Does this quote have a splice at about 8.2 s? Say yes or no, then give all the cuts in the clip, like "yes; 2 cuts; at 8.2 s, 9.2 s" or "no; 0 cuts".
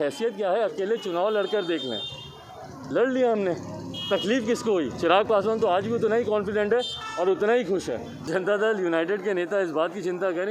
yes; 1 cut; at 8.2 s